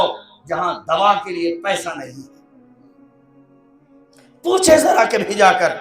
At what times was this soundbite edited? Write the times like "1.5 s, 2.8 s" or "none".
2.2 s, 4.4 s